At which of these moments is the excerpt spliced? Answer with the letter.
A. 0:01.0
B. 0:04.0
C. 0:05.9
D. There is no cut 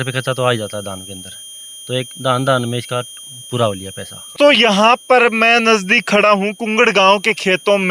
D